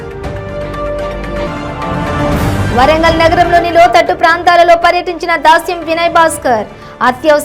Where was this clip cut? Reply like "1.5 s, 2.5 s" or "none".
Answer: none